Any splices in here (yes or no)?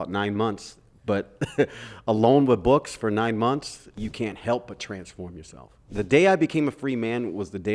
yes